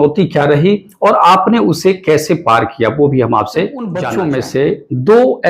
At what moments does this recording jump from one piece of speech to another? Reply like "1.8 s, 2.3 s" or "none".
4.0 s